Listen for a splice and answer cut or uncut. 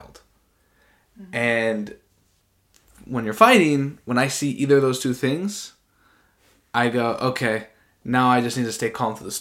uncut